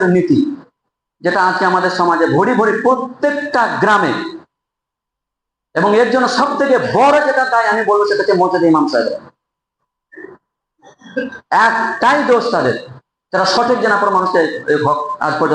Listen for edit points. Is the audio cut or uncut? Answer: uncut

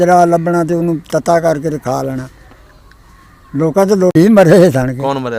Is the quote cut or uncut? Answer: cut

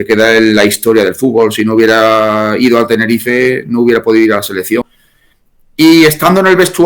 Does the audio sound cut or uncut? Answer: cut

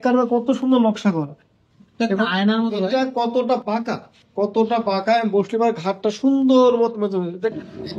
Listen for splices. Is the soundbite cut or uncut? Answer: uncut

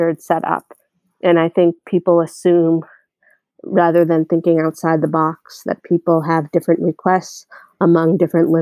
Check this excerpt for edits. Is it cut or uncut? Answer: uncut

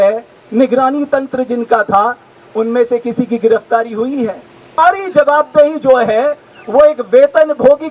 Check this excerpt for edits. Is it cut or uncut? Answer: cut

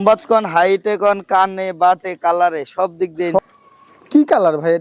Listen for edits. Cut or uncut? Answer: cut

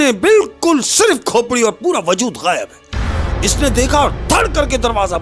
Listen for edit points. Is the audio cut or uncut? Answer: uncut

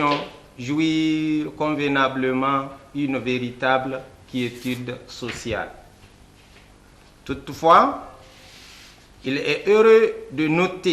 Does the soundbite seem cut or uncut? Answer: uncut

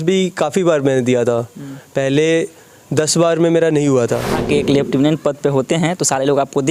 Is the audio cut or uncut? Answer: cut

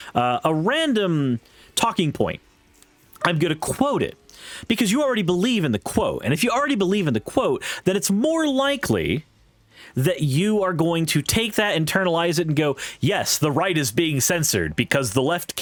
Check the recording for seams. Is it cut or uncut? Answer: uncut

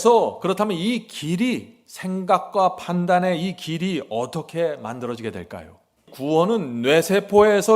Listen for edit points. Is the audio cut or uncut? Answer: cut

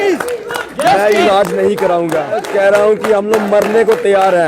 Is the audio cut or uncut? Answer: cut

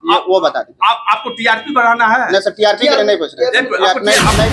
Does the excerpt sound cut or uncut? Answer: uncut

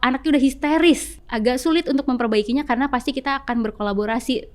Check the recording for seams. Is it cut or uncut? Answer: cut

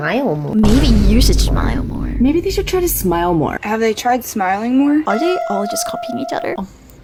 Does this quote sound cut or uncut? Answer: uncut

